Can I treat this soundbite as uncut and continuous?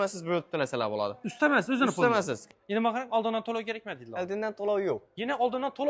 no; 1 cut; at 2.4 s

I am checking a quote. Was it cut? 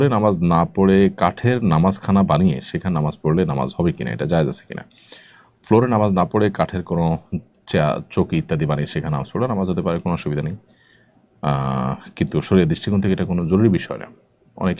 no; 0 cuts

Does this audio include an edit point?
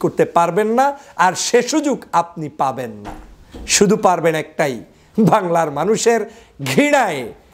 no; 0 cuts

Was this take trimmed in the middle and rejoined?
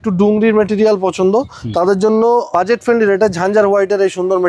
yes; 1 cut; at 2.5 s

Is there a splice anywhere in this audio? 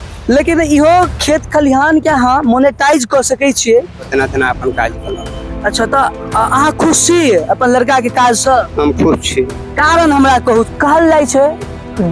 yes; 2 cuts; at 4.1 s, 10.7 s

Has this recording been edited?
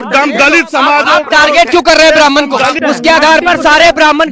yes; 1 cut; at 2.8 s

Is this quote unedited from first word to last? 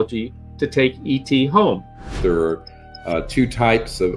no; 1 cut; at 2.2 s

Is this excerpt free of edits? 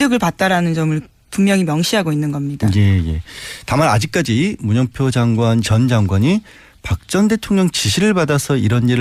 yes; 0 cuts

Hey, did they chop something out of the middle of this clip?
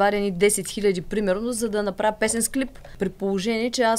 yes; 1 cut; at 2.8 s

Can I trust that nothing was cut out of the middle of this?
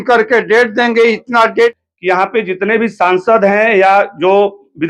no; 1 cut; at 1.8 s

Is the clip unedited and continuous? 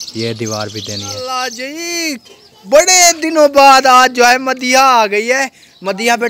no; 1 cut; at 1.1 s

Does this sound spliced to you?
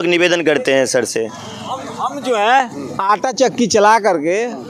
no; 0 cuts

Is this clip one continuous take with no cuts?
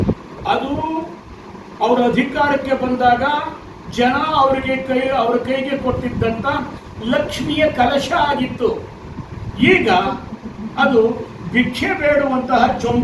yes; 0 cuts

